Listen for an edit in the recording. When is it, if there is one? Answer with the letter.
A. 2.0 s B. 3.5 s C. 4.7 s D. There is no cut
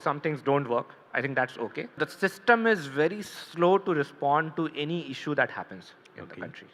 A